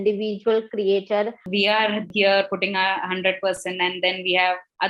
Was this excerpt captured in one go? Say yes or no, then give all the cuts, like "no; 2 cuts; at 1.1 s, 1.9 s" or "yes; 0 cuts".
no; 1 cut; at 1.4 s